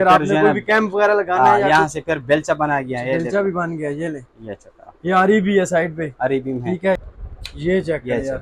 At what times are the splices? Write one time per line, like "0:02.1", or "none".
0:07.0